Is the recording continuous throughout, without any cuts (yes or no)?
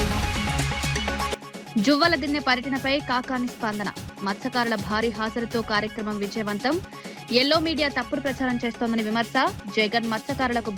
yes